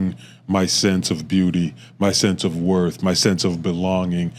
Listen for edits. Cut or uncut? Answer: uncut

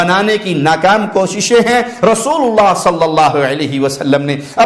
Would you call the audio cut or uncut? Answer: uncut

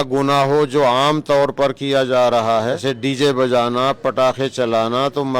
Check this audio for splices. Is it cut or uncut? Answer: cut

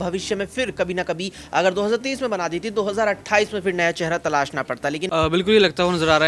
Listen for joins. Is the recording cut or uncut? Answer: cut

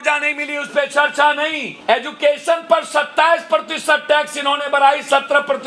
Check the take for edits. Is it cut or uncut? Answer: cut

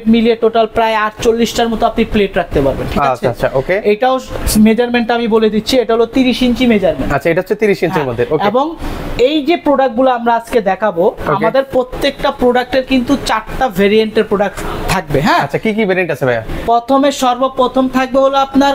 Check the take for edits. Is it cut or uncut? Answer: uncut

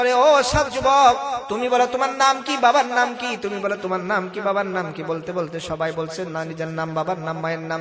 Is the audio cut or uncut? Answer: cut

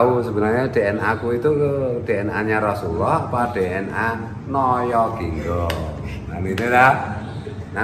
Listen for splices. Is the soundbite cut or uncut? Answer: uncut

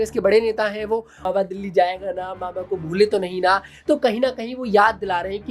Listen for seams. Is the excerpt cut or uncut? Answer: cut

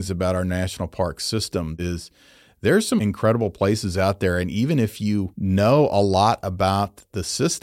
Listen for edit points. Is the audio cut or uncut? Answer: cut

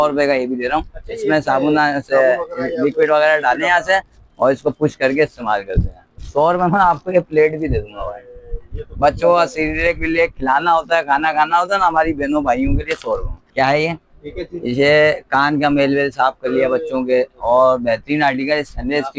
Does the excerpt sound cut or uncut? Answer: cut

